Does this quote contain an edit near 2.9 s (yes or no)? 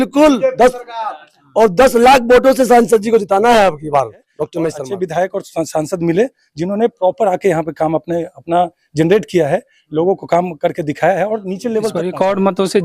no